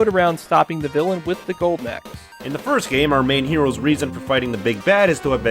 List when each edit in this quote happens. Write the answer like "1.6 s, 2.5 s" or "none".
1.0 s

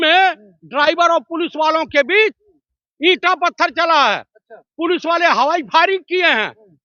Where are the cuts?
none

